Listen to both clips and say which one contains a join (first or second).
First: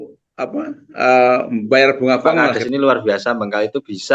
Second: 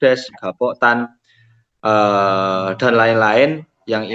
first